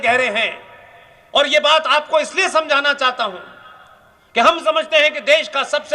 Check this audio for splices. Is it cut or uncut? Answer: uncut